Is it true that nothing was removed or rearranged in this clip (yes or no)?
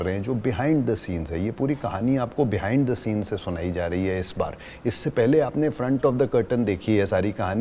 yes